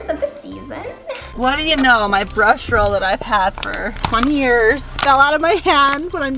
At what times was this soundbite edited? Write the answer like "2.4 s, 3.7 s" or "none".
1.3 s, 3.9 s, 4.9 s